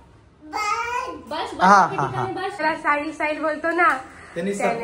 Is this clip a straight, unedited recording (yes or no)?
no